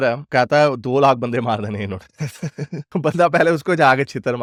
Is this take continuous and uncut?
yes; 0 cuts

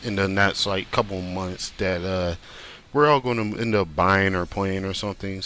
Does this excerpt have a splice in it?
yes; 1 cut; at 1.2 s

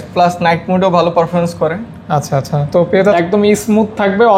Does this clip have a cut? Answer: yes; 1 cut; at 3.1 s

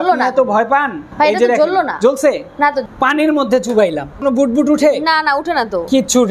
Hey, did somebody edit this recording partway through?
yes; 3 cuts; at 1.0 s, 2.8 s, 4.2 s

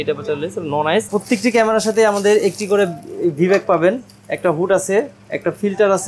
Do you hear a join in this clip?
yes; 1 cut; at 1.1 s

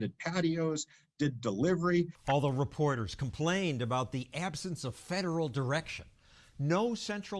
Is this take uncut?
yes; 0 cuts

